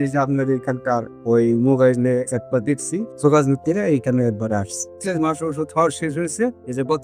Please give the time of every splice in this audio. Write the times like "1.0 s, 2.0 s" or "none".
3.1 s, 4.9 s